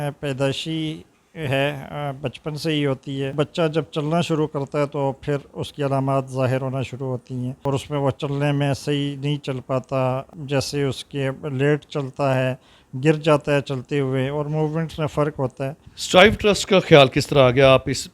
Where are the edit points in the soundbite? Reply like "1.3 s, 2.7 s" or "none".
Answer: 3.3 s, 7.5 s, 10.3 s, 15.9 s

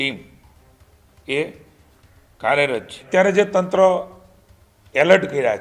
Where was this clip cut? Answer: 3.1 s

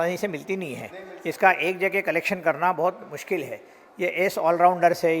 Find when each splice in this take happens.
none

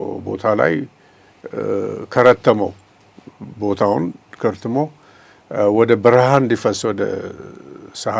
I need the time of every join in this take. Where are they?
none

